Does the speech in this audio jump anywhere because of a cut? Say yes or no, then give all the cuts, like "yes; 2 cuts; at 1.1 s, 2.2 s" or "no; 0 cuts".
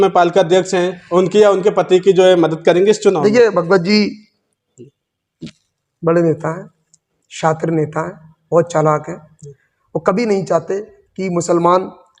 no; 0 cuts